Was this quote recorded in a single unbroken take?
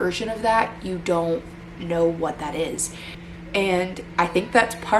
no; 1 cut; at 3.3 s

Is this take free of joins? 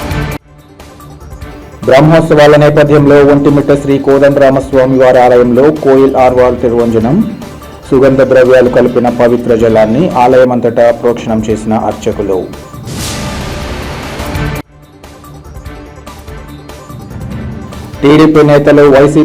no; 1 cut; at 1.3 s

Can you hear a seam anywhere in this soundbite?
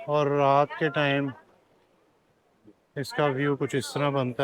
no; 0 cuts

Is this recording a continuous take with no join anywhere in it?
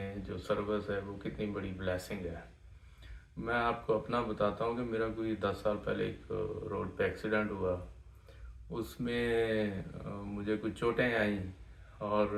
yes; 0 cuts

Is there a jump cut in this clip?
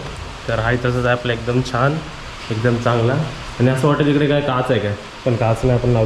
no; 0 cuts

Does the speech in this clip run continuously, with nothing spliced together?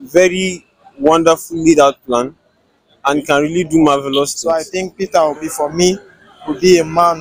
no; 1 cut; at 4.4 s

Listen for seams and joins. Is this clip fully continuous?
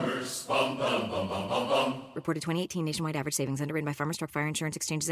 yes; 0 cuts

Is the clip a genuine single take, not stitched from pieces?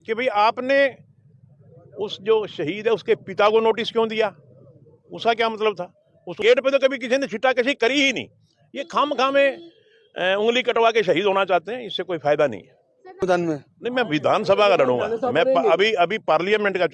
no; 2 cuts; at 6.4 s, 13.2 s

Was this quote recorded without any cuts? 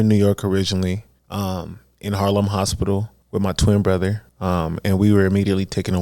no; 3 cuts; at 1.2 s, 3.2 s, 4.3 s

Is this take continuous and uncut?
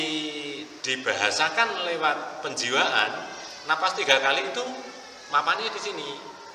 yes; 0 cuts

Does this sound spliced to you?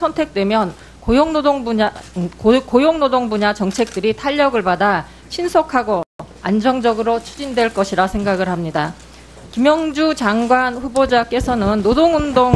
yes; 1 cut; at 1.3 s

